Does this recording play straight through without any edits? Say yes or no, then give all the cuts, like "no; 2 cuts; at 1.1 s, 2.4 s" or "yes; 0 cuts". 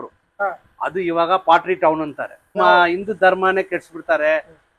no; 1 cut; at 2.6 s